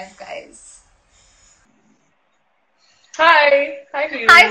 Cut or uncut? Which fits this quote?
cut